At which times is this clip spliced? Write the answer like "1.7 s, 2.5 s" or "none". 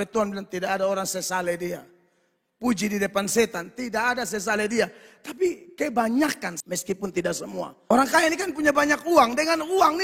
6.5 s, 7.8 s